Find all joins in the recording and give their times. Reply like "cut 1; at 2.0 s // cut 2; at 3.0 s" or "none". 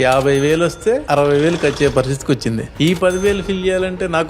cut 1; at 1.0 s // cut 2; at 2.7 s